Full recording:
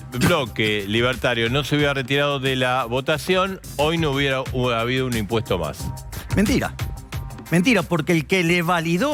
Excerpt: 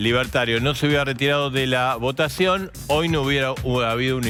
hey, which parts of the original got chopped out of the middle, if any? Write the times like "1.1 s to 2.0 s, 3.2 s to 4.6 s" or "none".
none